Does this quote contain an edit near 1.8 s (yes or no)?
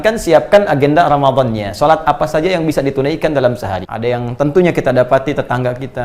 no